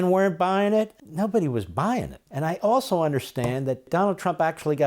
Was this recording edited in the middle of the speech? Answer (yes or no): yes